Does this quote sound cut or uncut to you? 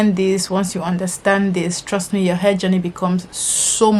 uncut